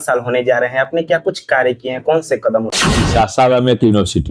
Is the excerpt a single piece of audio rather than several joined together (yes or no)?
no